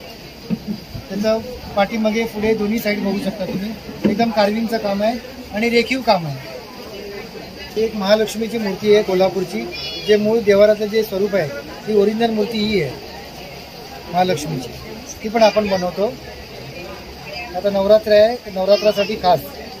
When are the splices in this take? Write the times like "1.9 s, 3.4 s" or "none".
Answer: none